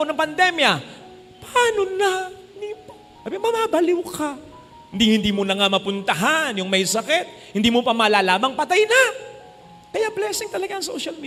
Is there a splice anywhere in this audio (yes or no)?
no